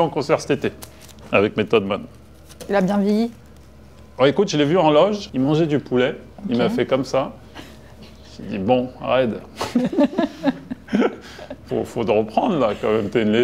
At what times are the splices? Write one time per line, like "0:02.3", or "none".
none